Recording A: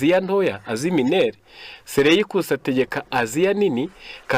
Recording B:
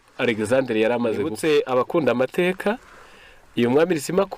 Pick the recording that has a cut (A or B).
B